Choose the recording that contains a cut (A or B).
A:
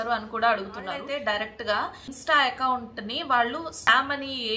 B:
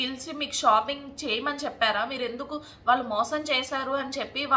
A